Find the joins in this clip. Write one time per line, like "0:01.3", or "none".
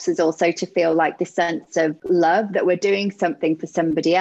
0:02.0